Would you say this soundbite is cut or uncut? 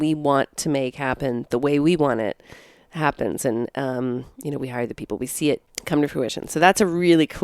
cut